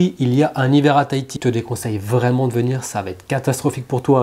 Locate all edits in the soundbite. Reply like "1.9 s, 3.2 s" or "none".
1.4 s

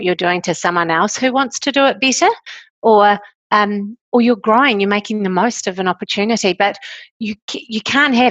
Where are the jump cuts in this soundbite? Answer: none

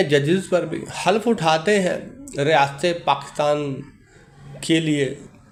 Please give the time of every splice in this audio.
none

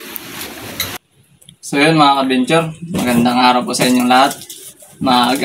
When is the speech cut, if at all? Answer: 1.0 s

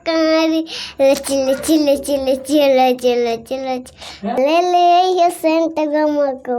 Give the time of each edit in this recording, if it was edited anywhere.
4.4 s

